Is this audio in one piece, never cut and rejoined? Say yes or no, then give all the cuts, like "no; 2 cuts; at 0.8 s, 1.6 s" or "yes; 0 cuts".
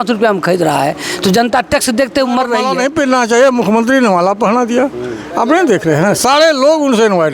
no; 1 cut; at 3.1 s